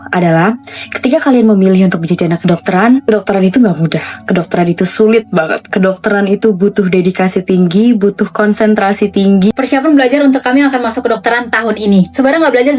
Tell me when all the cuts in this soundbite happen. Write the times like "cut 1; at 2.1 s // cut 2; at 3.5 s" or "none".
cut 1; at 9.5 s